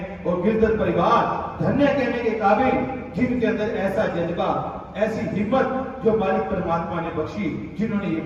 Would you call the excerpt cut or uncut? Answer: uncut